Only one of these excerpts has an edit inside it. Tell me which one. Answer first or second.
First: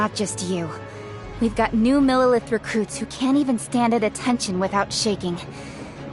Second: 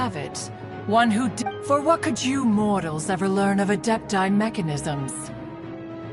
second